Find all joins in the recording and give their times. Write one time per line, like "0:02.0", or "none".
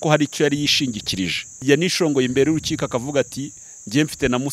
0:01.6